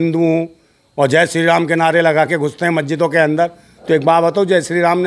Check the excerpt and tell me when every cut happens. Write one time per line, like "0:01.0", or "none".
none